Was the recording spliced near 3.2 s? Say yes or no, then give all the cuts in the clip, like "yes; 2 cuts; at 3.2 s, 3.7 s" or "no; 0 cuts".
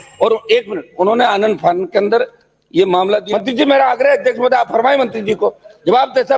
yes; 1 cut; at 3.2 s